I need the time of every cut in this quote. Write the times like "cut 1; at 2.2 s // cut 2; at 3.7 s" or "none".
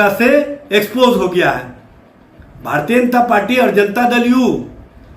none